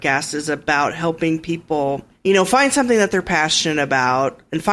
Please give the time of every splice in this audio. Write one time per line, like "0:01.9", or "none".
0:02.1